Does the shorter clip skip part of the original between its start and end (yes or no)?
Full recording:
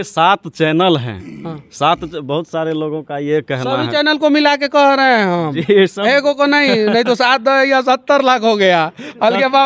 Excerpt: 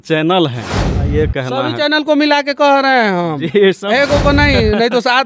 yes